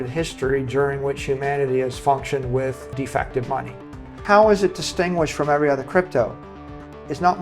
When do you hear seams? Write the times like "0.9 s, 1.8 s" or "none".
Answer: 2.9 s, 4.1 s

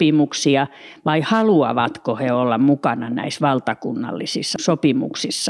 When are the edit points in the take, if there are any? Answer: 4.5 s

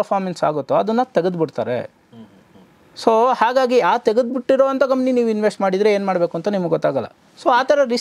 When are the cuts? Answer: none

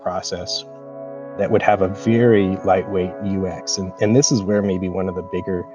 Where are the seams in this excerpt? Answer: none

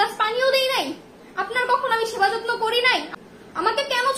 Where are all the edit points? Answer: 3.1 s

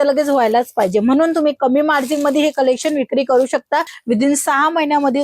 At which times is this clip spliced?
3.9 s

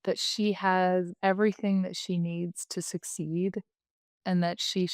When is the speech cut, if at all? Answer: 1.1 s

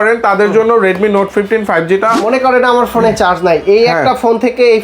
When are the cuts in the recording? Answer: 2.2 s

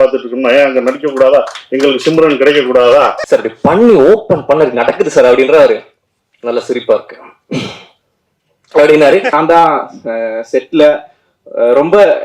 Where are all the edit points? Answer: 3.2 s, 9.3 s

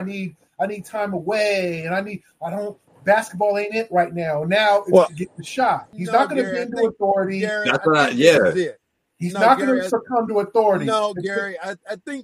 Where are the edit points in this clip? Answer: 5.9 s

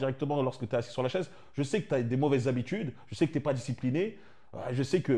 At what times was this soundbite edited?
none

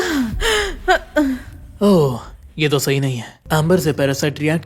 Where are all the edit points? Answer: 3.3 s

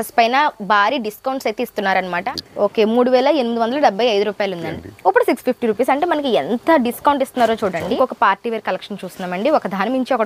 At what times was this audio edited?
2.2 s, 4.6 s, 7.9 s

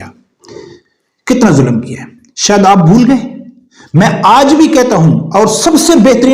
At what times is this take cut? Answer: none

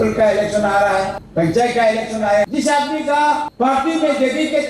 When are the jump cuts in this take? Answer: 1.2 s, 2.5 s, 3.5 s

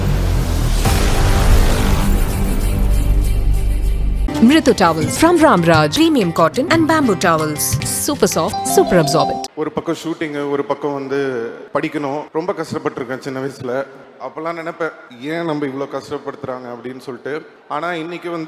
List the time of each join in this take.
9.5 s, 11.6 s, 12.3 s, 14.0 s, 15.1 s, 17.6 s

